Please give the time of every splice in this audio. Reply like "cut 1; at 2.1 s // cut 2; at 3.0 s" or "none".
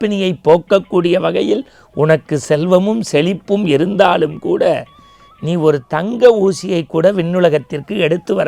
none